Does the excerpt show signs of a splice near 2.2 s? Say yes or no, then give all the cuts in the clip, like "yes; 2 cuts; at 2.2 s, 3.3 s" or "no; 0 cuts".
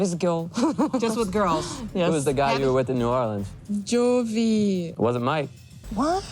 no; 1 cut; at 4.9 s